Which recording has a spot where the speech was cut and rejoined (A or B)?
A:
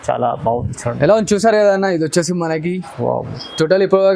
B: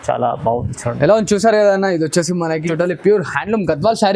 B